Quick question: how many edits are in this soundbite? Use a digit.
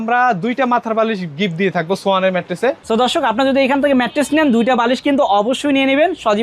1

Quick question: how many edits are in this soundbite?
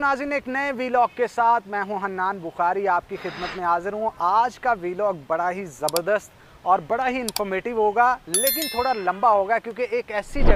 0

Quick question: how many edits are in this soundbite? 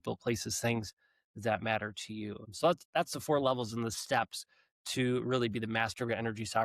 1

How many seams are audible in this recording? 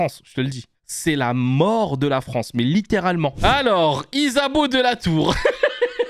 1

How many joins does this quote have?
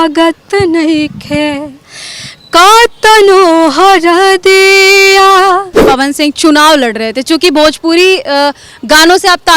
1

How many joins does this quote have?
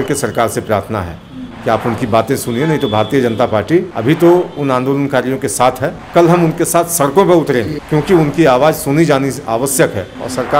3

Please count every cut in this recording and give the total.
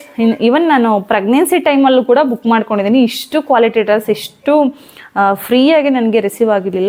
0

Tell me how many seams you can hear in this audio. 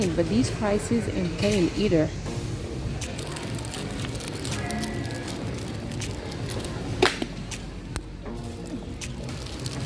0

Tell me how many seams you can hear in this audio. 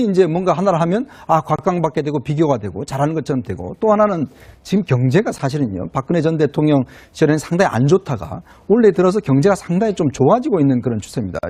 0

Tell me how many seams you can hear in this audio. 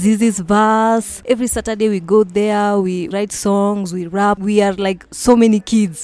3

